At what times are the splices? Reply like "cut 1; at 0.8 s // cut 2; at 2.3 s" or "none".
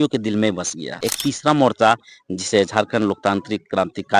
cut 1; at 1.1 s